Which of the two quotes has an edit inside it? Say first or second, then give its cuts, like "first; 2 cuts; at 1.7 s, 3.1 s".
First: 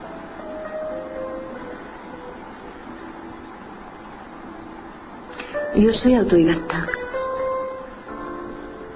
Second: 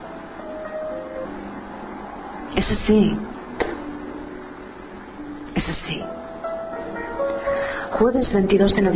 first; 1 cut; at 1.2 s